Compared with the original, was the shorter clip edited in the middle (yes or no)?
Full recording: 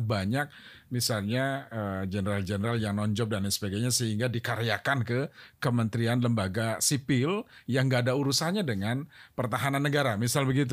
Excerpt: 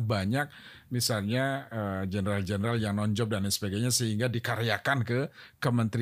no